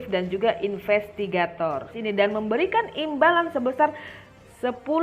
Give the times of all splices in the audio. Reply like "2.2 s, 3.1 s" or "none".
2.0 s